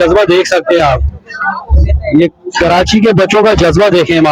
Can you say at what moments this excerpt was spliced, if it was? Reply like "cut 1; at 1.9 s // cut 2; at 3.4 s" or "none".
none